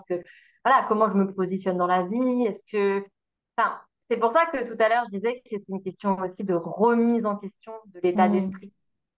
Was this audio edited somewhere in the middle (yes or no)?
no